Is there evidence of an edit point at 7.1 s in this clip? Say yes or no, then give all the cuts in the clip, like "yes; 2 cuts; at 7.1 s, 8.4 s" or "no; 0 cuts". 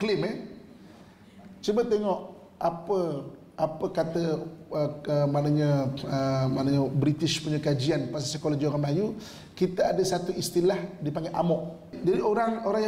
no; 1 cut; at 11.9 s